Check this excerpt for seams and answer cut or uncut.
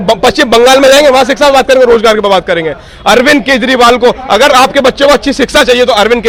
uncut